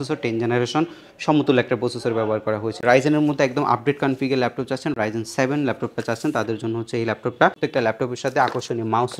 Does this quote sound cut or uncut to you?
cut